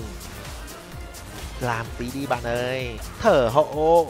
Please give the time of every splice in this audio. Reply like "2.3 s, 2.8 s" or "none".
3.0 s

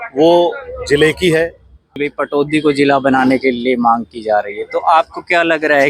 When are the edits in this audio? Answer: 2.0 s

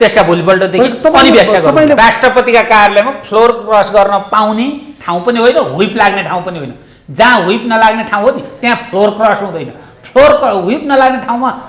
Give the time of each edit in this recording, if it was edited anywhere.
2.0 s

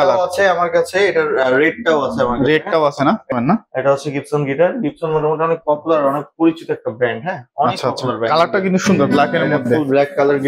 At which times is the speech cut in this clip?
3.3 s

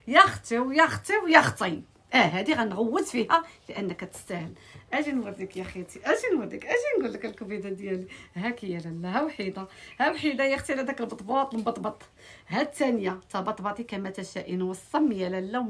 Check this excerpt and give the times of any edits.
none

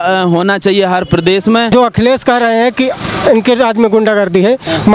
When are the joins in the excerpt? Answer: 1.7 s

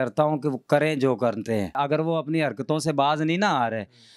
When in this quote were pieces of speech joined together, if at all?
1.7 s

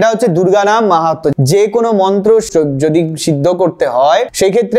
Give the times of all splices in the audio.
1.3 s, 2.5 s

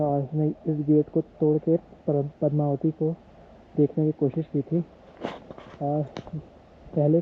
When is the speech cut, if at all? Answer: none

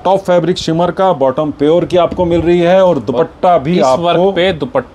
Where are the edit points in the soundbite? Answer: none

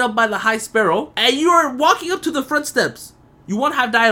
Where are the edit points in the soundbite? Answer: 1.1 s

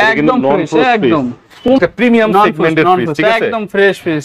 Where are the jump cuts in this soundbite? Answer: 1.7 s

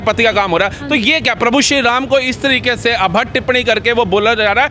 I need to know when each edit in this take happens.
none

